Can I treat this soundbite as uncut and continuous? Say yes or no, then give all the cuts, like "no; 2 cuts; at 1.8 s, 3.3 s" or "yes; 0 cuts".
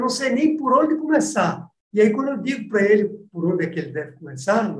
yes; 0 cuts